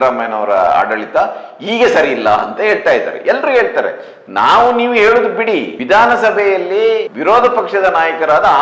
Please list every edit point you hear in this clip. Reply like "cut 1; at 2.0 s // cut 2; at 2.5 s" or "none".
cut 1; at 5.7 s // cut 2; at 7.1 s